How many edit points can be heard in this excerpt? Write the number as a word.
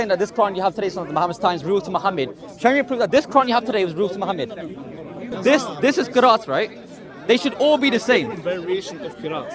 one